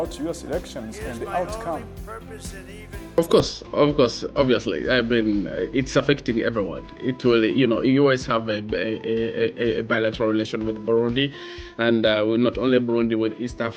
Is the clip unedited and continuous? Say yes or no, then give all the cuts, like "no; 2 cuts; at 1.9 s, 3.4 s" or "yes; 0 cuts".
yes; 0 cuts